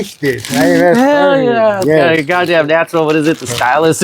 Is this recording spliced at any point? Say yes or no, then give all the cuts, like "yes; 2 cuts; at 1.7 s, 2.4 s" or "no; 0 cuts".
no; 0 cuts